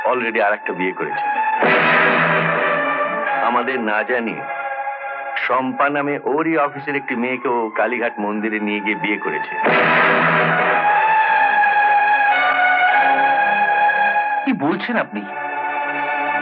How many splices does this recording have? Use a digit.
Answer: 0